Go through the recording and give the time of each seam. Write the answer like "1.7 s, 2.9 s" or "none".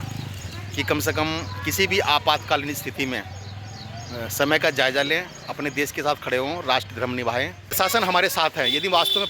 7.8 s

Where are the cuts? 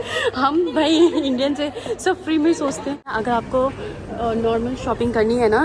3.2 s

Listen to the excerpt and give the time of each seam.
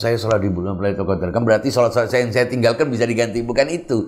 none

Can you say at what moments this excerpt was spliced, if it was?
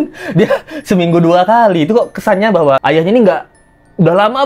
2.8 s

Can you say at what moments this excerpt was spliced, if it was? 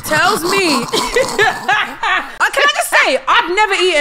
2.4 s

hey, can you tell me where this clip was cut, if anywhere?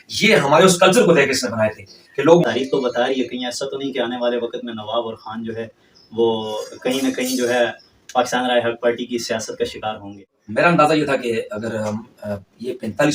2.4 s, 10.1 s

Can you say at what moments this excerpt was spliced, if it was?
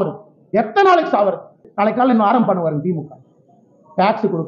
1.6 s

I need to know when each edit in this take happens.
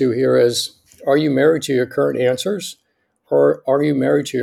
none

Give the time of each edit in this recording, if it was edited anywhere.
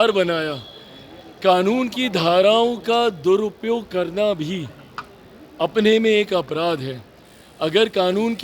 none

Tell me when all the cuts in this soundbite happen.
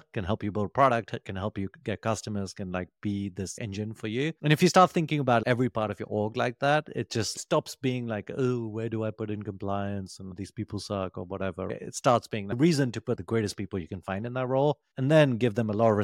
none

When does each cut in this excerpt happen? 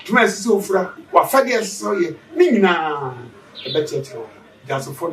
1.0 s

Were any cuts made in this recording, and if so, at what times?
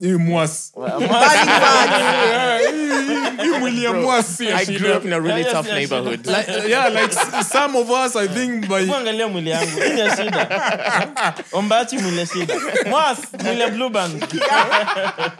none

